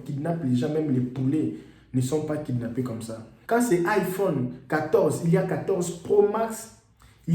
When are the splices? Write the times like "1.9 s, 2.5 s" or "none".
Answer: 3.3 s